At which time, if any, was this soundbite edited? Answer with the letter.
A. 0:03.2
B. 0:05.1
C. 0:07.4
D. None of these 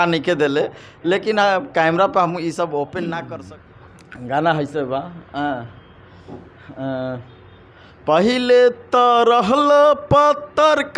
A